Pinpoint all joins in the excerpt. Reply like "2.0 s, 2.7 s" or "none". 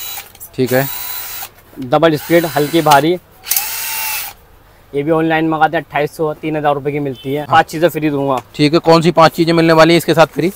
7.5 s